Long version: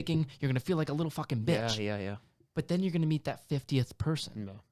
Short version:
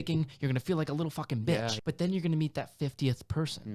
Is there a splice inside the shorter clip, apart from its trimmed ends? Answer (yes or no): yes